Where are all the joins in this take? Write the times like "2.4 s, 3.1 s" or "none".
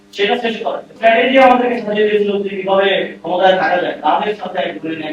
0.9 s